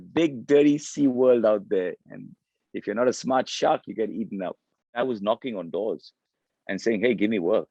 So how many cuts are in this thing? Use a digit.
1